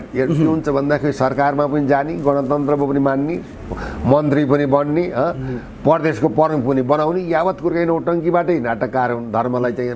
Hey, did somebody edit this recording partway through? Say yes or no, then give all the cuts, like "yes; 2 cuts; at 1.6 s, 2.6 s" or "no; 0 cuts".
no; 0 cuts